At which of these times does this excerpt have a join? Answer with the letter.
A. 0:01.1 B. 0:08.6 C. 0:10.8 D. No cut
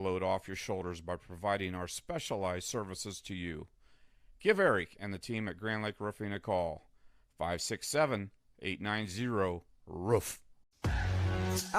C